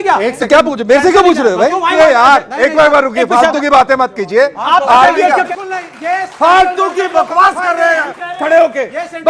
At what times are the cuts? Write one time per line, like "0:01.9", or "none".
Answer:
0:01.9
0:05.5